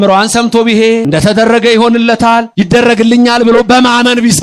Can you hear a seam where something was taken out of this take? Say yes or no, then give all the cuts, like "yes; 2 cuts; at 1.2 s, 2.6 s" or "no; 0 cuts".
yes; 2 cuts; at 1.0 s, 2.5 s